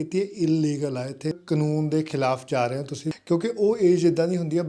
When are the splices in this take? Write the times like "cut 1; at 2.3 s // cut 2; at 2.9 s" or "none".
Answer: cut 1; at 1.3 s // cut 2; at 3.1 s